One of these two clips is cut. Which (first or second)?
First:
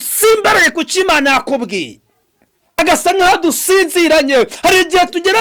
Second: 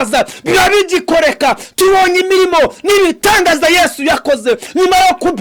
first